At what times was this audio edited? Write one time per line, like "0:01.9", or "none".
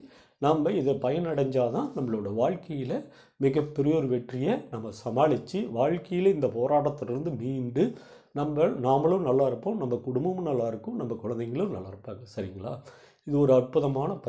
none

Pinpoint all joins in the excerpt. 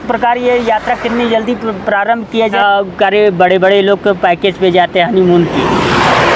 0:02.6

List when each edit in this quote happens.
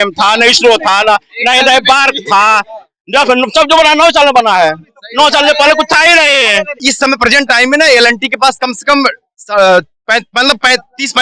0:06.8

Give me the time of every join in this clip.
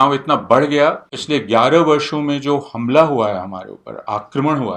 0:01.1

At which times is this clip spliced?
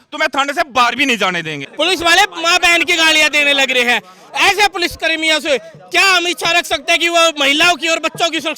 0:01.6

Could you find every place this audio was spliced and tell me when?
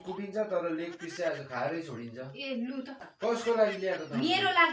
0:03.0

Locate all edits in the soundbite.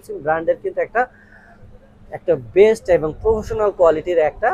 none

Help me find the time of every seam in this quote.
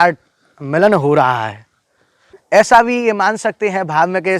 0:02.3

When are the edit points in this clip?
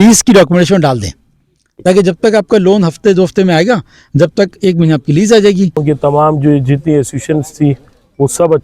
0:05.8

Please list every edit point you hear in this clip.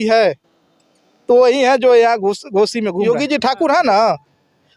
0:03.1

